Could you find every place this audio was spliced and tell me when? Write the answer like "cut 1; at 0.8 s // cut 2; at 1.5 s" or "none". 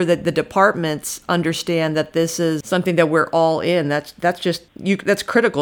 cut 1; at 2.6 s // cut 2; at 4.7 s